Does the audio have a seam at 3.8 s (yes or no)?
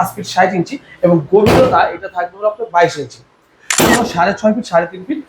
yes